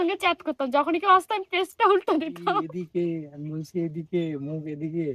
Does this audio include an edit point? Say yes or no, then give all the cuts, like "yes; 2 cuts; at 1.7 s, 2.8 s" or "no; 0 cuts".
yes; 1 cut; at 2.7 s